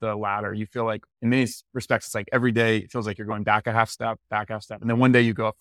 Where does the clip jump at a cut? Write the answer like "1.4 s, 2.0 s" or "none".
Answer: 1.1 s